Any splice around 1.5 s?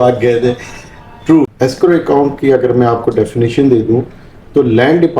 yes; 1 cut; at 1.5 s

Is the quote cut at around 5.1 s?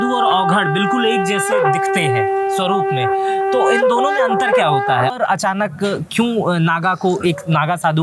yes; 1 cut; at 5.1 s

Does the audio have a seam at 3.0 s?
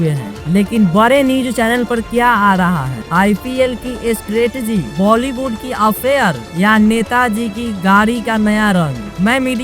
yes; 1 cut; at 3.0 s

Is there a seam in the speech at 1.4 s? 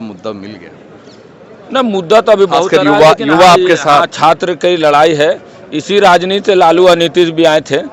no; 0 cuts

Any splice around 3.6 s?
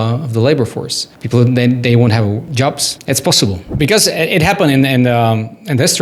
yes; 1 cut; at 3.6 s

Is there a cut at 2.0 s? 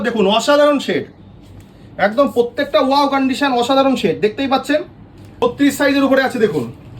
no; 1 cut; at 5.4 s

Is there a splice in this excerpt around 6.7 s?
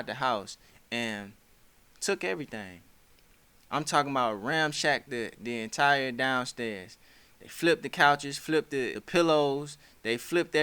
no; 1 cut; at 9.0 s

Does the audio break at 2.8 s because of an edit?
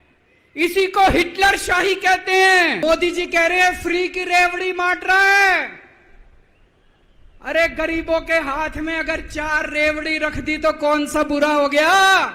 yes; 1 cut; at 2.8 s

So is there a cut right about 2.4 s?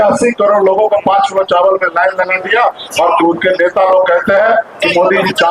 no; 0 cuts

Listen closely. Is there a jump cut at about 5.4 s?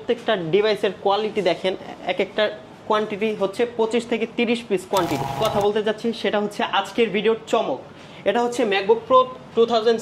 yes; 1 cut; at 5.4 s

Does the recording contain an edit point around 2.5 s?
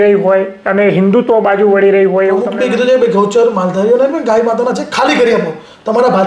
yes; 1 cut; at 2.5 s

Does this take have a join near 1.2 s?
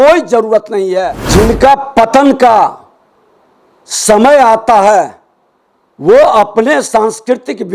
yes; 1 cut; at 1.2 s

